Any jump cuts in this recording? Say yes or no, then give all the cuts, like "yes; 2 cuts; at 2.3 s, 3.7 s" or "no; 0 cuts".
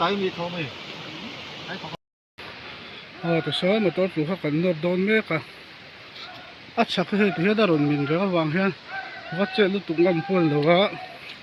yes; 1 cut; at 2.0 s